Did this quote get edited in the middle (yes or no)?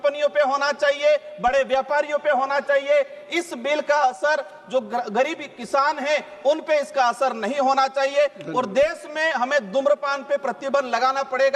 no